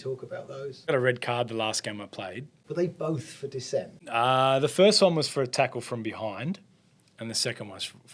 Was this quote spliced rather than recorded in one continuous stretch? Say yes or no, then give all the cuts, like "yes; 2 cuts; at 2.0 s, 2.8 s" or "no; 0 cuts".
yes; 2 cuts; at 0.9 s, 2.5 s